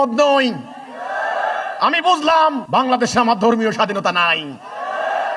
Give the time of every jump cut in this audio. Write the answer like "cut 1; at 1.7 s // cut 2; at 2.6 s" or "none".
cut 1; at 2.6 s